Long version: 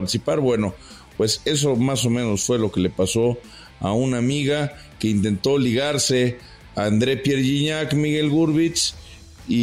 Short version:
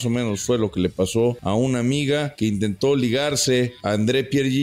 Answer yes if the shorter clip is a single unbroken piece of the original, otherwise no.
no